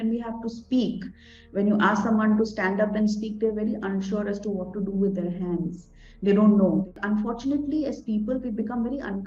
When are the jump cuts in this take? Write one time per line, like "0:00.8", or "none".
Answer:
0:06.9